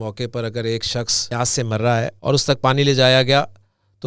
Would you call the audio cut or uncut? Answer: cut